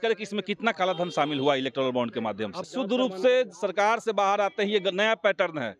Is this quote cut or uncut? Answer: cut